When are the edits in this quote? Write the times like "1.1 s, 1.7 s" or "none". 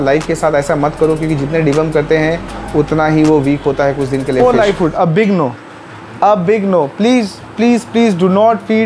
4.4 s